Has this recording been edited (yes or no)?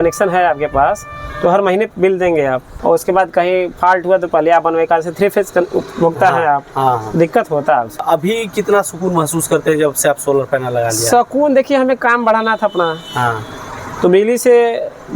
yes